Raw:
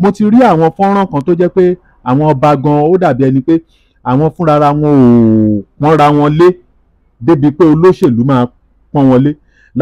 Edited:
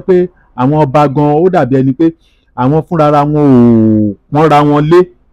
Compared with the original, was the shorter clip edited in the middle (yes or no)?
no